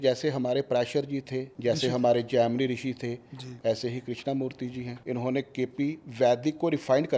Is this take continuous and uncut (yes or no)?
no